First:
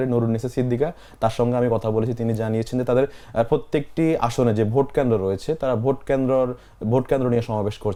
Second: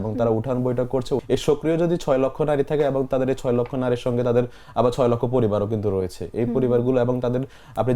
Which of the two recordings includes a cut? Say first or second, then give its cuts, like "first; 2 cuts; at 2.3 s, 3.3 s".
second; 1 cut; at 1.2 s